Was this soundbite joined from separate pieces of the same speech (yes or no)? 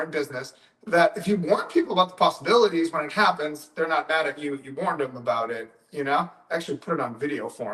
no